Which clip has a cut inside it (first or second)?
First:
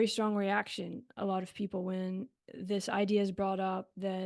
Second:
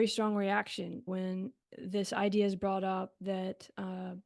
second